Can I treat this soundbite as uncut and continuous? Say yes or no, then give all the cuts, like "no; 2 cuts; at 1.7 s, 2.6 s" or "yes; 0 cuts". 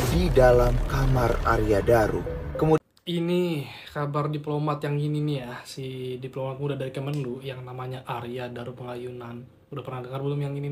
no; 1 cut; at 2.8 s